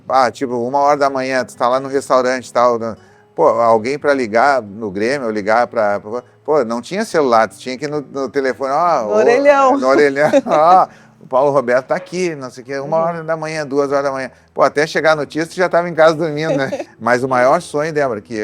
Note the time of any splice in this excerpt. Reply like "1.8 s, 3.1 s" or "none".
16.8 s